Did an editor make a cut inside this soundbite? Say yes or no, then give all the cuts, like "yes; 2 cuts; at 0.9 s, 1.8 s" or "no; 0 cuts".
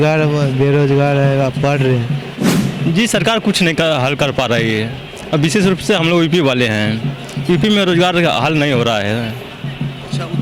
yes; 1 cut; at 2.5 s